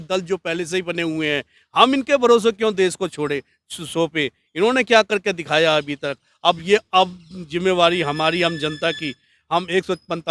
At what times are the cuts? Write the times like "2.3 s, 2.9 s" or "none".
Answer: none